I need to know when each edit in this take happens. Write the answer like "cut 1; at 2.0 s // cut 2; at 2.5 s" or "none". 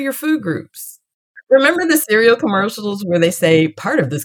cut 1; at 1.2 s